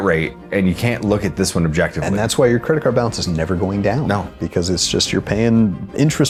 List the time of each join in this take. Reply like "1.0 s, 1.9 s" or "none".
none